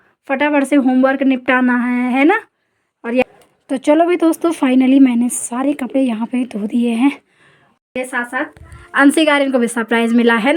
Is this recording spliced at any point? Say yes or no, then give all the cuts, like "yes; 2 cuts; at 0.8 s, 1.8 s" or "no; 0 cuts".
yes; 2 cuts; at 3.2 s, 7.9 s